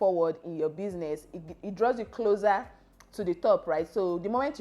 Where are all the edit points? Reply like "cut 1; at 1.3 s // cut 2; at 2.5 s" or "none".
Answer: none